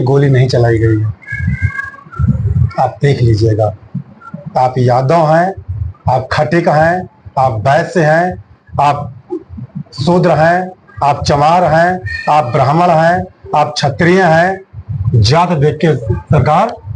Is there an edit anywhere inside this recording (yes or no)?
no